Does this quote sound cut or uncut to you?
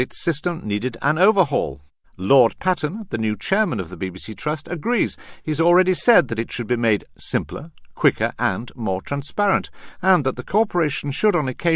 uncut